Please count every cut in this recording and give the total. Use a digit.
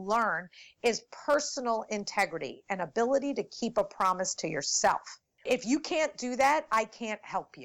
1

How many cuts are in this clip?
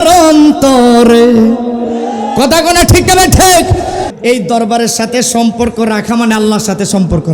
1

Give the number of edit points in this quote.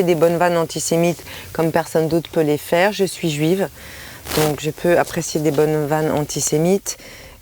0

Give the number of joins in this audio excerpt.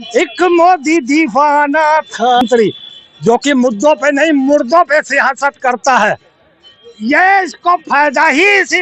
1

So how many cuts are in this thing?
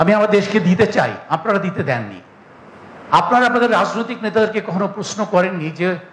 0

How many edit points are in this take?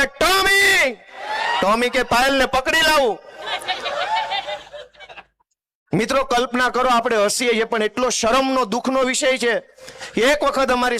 0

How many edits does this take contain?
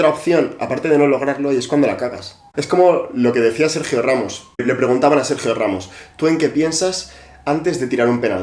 2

